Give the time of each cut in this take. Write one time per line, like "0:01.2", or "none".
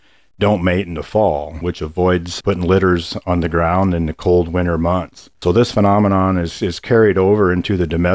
0:01.6
0:05.3